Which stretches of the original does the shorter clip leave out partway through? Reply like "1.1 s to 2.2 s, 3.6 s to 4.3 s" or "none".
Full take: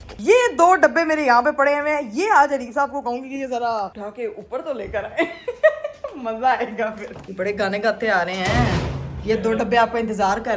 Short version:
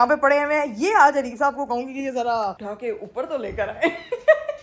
none